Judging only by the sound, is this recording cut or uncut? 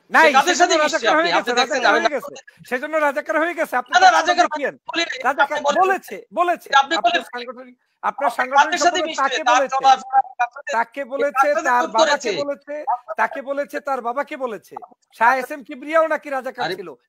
uncut